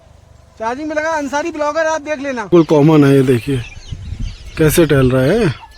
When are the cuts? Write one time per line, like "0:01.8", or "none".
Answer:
0:02.5